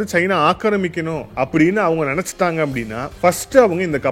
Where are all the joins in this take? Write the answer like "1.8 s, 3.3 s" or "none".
1.2 s, 3.0 s